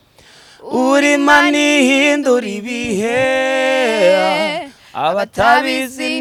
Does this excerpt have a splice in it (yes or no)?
no